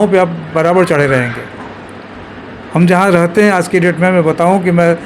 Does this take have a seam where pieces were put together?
no; 0 cuts

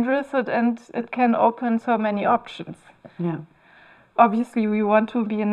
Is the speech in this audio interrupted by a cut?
no; 0 cuts

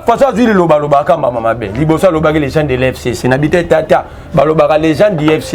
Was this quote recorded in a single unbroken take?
yes; 0 cuts

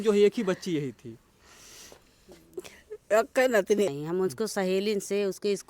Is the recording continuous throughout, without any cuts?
no; 1 cut; at 3.9 s

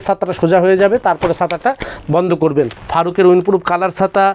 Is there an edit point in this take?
yes; 1 cut; at 2.8 s

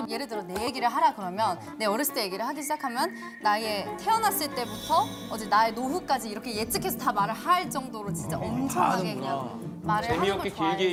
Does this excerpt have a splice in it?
no; 0 cuts

